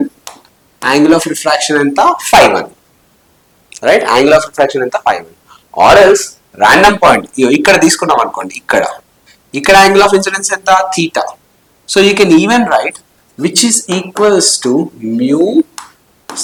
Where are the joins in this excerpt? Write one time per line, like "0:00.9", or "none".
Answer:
none